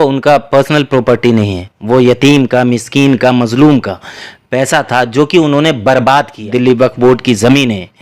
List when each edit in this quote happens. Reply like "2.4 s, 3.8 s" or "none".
6.4 s